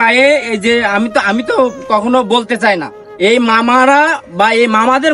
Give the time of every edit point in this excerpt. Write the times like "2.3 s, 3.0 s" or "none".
none